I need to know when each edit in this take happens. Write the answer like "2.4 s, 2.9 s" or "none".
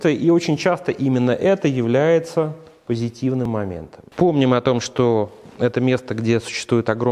3.4 s